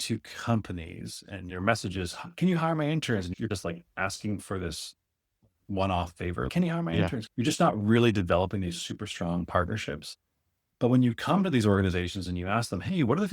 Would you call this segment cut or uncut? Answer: cut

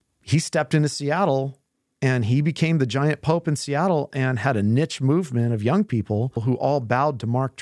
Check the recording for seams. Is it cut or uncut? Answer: cut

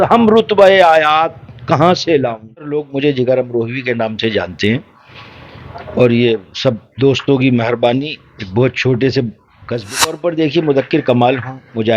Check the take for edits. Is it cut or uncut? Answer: cut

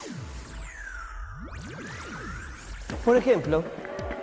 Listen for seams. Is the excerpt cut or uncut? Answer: cut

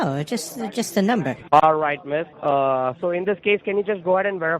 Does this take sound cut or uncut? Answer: cut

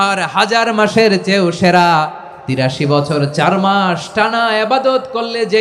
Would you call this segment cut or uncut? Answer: cut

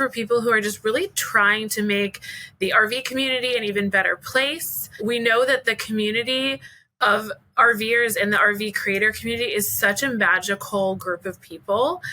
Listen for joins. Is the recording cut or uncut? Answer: cut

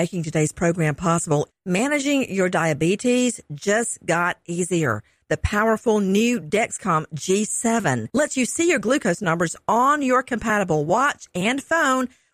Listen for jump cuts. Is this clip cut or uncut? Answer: uncut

